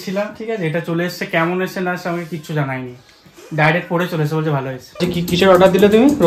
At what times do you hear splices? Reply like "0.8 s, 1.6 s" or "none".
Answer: 5.1 s